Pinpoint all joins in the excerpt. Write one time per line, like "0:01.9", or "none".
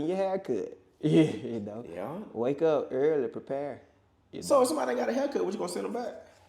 none